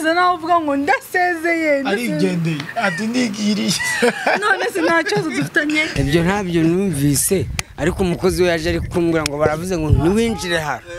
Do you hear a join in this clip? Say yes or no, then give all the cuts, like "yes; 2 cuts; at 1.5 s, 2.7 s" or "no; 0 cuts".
yes; 1 cut; at 5.9 s